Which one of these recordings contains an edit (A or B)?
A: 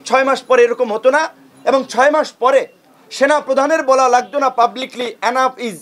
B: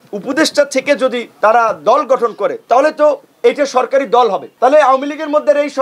B